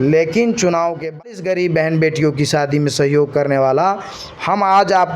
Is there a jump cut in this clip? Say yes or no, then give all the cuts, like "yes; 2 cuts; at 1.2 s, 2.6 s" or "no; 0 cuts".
yes; 1 cut; at 1.2 s